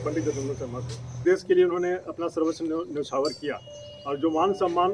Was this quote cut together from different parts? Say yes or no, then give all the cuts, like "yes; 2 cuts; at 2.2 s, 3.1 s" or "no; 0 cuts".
yes; 1 cut; at 1.2 s